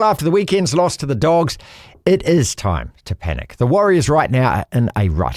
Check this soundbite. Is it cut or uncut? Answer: uncut